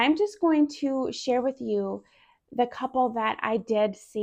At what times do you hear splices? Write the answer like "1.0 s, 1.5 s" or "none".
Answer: none